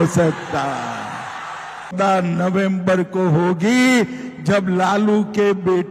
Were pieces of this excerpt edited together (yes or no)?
yes